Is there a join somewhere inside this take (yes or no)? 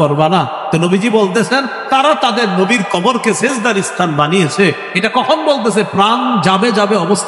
no